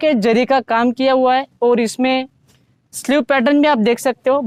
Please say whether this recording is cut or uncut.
uncut